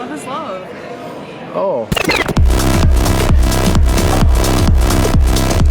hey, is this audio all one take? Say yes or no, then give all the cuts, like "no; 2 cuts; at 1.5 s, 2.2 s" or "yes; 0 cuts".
yes; 0 cuts